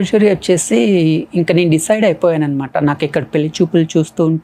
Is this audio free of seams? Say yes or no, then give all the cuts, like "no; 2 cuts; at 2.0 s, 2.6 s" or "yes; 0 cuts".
yes; 0 cuts